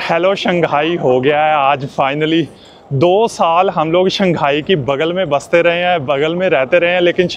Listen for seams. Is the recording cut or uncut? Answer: uncut